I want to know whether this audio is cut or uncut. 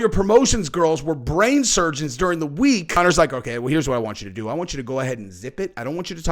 cut